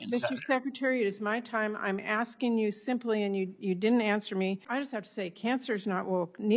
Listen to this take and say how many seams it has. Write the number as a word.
one